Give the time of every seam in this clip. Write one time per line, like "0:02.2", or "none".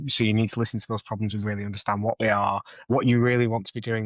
0:02.9